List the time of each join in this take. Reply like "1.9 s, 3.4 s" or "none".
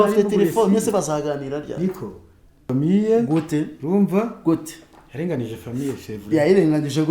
2.6 s